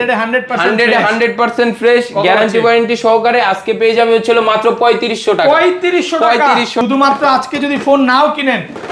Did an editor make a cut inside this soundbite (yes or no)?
yes